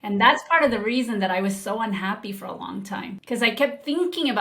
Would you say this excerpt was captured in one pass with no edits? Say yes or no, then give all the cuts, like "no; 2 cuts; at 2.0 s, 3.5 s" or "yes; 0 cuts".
no; 1 cut; at 3.2 s